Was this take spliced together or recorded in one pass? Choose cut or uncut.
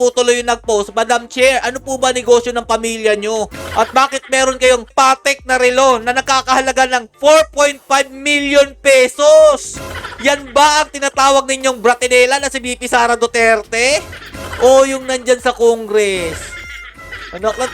uncut